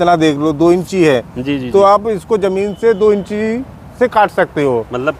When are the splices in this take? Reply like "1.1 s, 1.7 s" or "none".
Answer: none

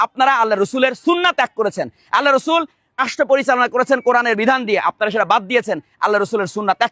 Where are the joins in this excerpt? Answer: 3.1 s

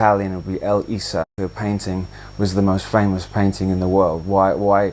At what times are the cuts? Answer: 1.3 s

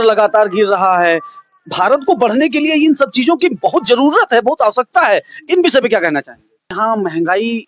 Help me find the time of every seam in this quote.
6.8 s

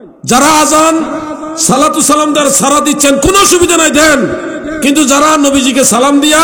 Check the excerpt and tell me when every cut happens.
none

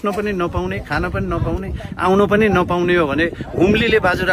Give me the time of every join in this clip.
none

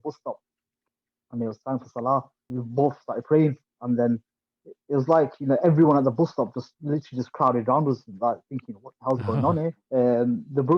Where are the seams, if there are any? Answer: 2.6 s, 9.8 s

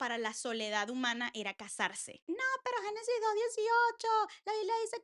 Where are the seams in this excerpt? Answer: 2.2 s

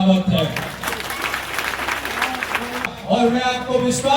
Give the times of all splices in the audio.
2.9 s

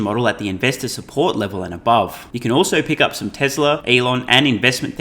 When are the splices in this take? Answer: 2.3 s, 3.8 s

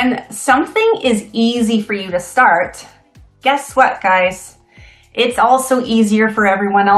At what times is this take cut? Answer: none

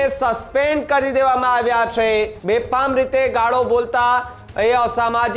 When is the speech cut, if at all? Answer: 2.4 s

